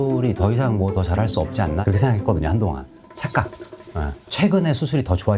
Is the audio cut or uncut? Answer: uncut